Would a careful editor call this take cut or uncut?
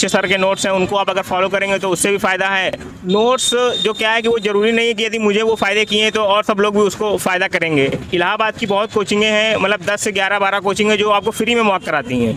cut